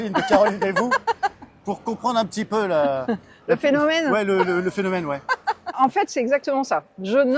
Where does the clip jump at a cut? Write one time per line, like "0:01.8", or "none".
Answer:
0:05.7